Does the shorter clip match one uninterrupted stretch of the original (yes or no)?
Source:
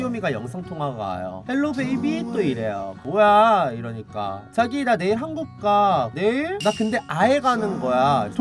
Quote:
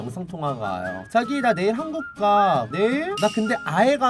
no